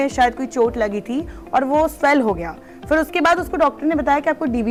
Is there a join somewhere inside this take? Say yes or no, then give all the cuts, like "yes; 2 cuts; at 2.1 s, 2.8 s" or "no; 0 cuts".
no; 0 cuts